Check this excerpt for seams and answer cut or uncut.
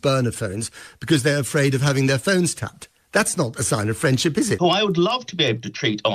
cut